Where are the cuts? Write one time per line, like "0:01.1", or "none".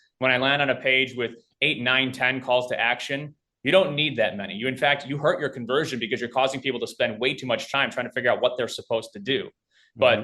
0:07.7